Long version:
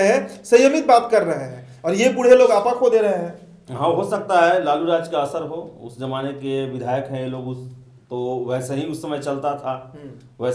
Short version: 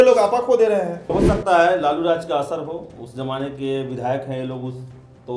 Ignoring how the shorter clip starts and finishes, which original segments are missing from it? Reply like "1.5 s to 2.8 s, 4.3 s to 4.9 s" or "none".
3.5 s to 4.0 s